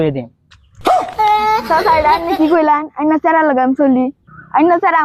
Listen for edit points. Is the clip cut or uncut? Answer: uncut